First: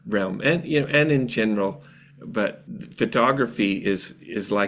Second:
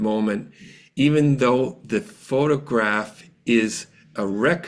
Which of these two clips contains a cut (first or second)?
first